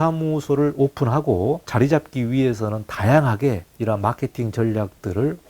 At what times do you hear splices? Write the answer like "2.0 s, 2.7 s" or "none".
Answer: 1.7 s, 3.7 s